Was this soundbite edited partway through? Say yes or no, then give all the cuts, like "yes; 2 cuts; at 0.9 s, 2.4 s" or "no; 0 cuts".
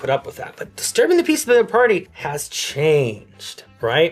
no; 0 cuts